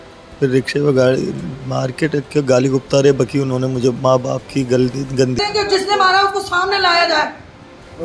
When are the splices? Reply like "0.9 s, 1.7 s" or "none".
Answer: 5.4 s